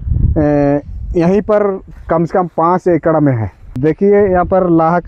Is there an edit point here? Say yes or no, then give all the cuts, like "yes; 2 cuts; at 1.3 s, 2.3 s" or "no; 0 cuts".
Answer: yes; 1 cut; at 3.8 s